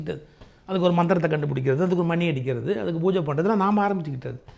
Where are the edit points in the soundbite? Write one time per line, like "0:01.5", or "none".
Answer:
none